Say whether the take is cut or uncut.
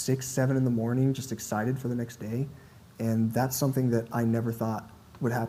uncut